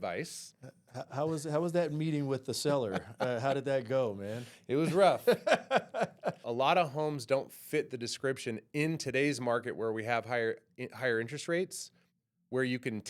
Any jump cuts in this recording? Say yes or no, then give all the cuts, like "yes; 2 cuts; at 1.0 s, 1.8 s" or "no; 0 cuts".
yes; 1 cut; at 6.4 s